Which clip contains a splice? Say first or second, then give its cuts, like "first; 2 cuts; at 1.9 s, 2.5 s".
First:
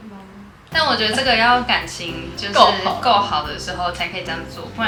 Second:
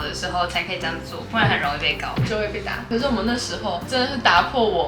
second; 1 cut; at 2.8 s